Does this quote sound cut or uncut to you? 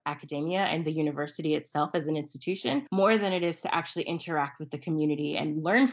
cut